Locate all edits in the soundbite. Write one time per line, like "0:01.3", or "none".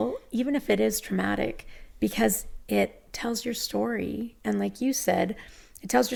none